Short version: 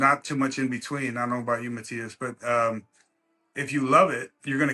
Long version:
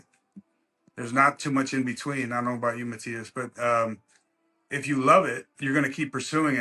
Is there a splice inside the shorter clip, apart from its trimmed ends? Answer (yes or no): no